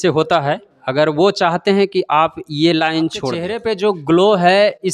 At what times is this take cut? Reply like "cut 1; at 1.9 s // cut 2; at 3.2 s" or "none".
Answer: cut 1; at 3.6 s